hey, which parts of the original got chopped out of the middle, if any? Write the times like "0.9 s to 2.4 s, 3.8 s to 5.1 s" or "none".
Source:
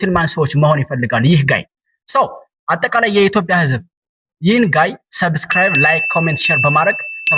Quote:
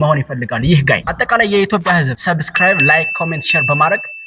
1.7 s to 2.7 s, 3.8 s to 5.1 s